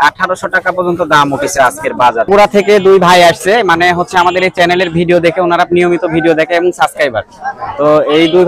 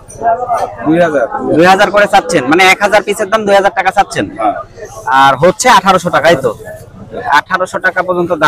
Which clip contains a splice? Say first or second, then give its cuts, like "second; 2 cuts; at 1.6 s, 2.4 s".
first; 1 cut; at 2.3 s